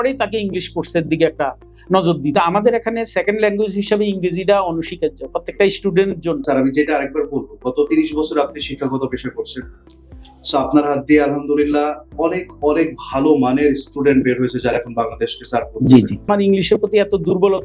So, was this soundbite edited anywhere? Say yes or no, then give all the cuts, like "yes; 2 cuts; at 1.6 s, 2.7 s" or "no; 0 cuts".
yes; 3 cuts; at 2.3 s, 6.4 s, 16.3 s